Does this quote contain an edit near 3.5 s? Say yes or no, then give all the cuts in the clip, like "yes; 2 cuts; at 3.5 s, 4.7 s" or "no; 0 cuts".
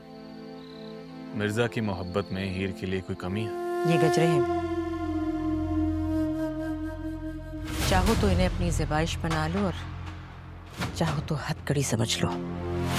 yes; 1 cut; at 3.5 s